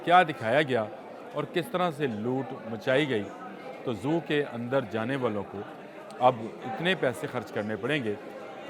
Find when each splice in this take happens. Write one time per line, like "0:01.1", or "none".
none